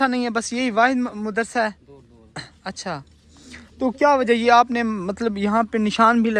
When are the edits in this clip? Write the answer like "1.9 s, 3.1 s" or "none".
none